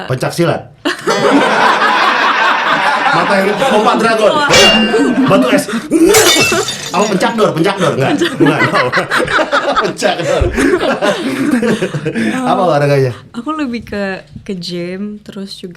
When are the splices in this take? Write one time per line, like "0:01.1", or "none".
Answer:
none